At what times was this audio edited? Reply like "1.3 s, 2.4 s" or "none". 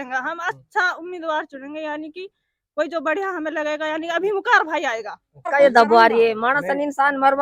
5.5 s